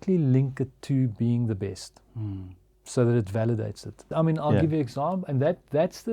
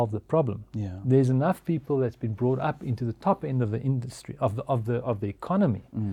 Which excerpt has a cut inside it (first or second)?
first